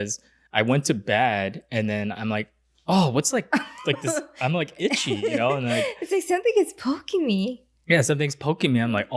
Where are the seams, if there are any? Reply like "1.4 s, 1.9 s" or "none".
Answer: none